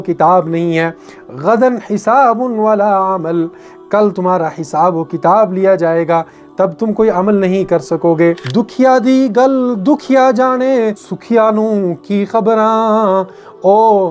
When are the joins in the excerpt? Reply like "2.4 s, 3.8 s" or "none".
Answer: 8.4 s, 11.1 s